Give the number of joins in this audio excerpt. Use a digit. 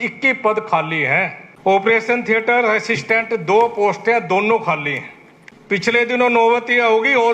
2